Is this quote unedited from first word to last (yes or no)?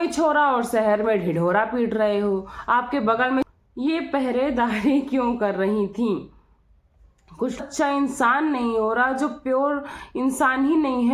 no